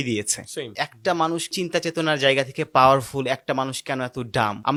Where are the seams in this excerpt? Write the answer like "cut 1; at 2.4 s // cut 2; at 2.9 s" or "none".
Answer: none